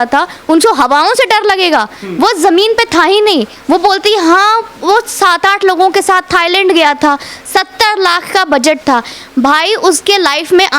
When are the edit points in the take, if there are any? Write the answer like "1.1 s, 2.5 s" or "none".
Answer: none

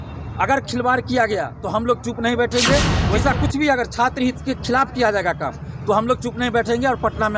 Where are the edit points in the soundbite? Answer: 3.0 s

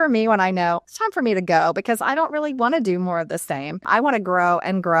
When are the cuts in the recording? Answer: 0.9 s, 3.8 s

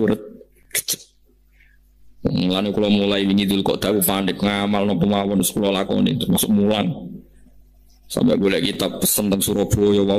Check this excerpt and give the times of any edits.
none

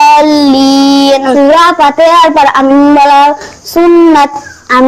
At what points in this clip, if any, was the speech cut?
1.2 s

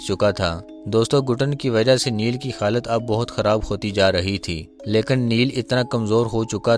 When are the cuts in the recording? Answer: 4.7 s

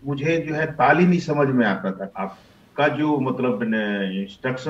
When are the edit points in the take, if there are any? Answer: 2.1 s

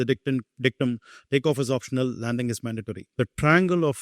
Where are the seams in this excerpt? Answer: 3.1 s

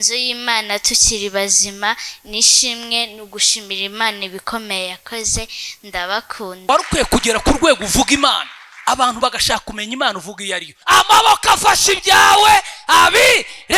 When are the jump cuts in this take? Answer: 6.7 s, 10.7 s

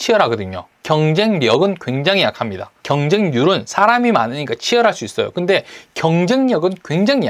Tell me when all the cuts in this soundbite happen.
none

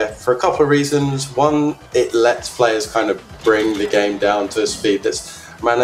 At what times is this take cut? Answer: none

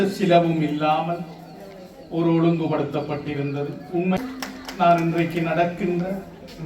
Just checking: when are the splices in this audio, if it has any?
4.2 s

